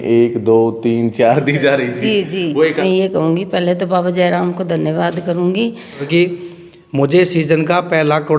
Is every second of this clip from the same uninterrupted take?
no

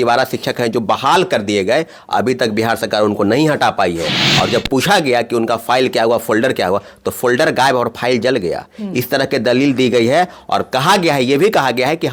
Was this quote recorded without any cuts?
yes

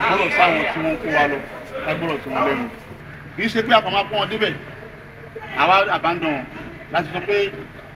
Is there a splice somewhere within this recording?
yes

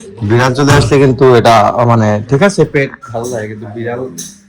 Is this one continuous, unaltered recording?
yes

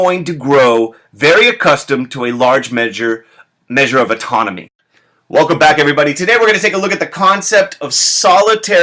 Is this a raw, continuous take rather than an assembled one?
yes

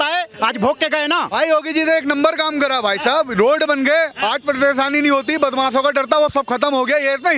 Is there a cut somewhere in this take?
yes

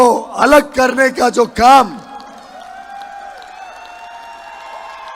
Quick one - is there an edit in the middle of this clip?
no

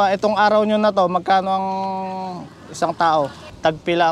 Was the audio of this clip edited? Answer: no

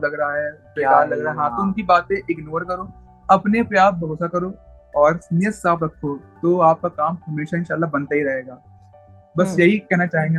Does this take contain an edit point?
no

